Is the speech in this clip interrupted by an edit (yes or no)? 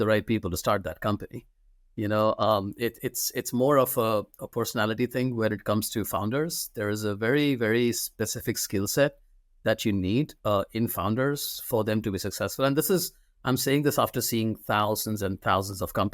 no